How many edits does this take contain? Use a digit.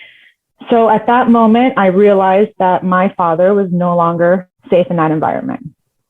1